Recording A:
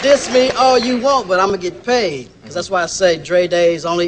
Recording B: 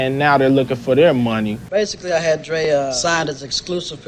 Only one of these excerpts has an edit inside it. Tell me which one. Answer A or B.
B